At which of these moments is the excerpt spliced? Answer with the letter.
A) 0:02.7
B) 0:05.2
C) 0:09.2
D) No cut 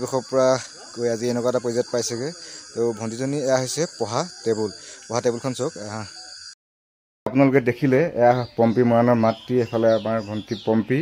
D